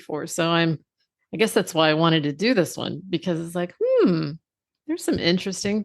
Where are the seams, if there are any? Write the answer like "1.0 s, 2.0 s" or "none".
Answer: none